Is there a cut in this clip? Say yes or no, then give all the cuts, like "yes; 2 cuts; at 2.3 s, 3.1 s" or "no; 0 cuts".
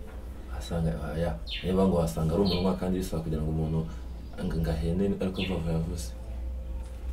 no; 0 cuts